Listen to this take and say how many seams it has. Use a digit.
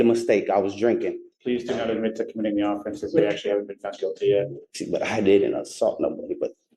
2